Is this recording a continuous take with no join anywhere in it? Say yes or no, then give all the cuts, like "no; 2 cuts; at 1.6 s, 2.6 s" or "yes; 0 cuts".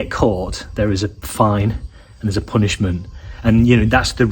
yes; 0 cuts